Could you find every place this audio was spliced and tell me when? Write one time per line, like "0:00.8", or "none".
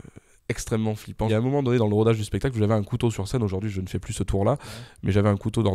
0:01.3

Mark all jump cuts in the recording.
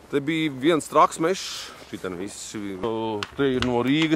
0:02.8

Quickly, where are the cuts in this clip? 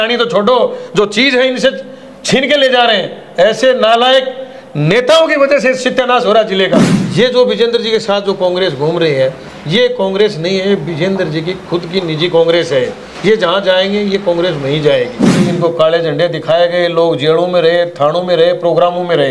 0:07.0
0:15.4

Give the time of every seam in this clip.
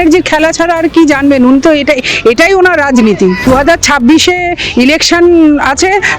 0:03.5

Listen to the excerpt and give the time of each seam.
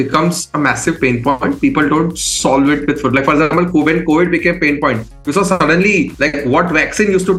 none

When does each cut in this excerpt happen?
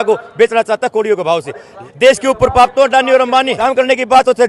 0:01.8
0:03.6

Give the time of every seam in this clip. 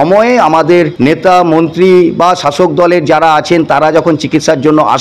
0:00.9

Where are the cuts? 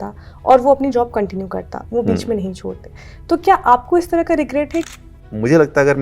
0:04.9

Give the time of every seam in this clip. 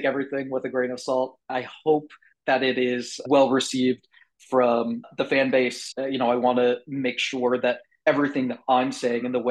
0:03.2

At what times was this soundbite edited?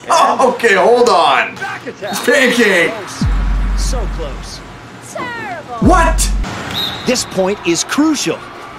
0:06.5

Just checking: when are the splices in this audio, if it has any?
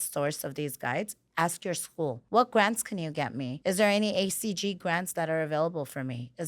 0:02.2
0:03.5

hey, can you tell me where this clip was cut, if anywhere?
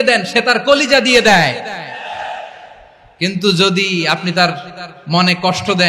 none

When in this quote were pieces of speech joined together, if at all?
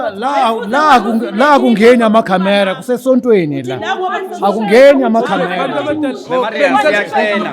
none

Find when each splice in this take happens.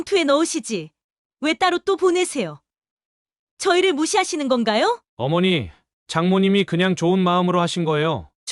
0:05.1

